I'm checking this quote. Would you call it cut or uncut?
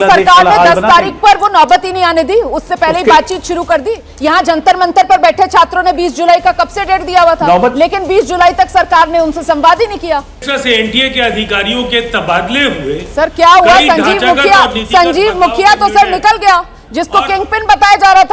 cut